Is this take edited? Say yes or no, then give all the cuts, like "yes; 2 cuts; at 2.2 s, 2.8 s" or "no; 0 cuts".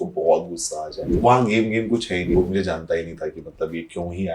yes; 2 cuts; at 1.1 s, 2.3 s